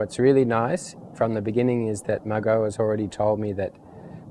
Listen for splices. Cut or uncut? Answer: uncut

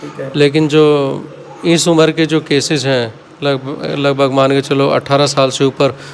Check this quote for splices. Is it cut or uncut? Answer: uncut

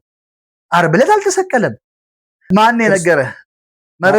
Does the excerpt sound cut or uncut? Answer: cut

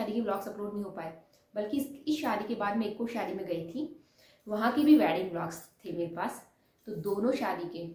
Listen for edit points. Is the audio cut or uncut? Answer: uncut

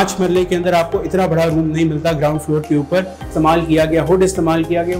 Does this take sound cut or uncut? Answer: cut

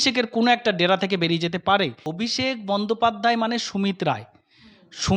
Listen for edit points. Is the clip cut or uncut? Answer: cut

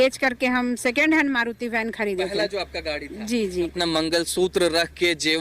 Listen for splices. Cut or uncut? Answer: cut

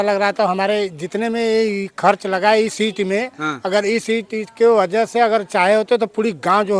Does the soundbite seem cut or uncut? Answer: uncut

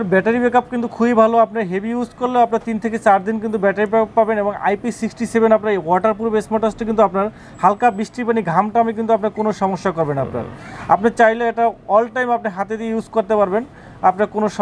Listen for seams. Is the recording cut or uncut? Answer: uncut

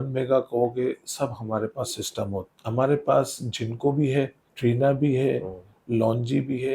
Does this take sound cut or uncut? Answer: cut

